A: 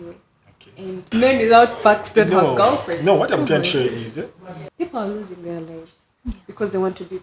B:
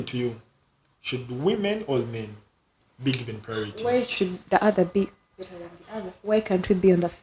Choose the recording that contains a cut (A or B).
A